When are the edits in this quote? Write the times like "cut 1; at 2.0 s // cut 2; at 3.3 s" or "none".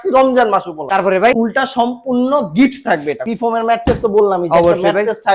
cut 1; at 1.0 s // cut 2; at 3.2 s